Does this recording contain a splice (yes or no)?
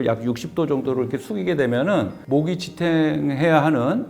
yes